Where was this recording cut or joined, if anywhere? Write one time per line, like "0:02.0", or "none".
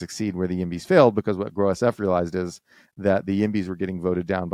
none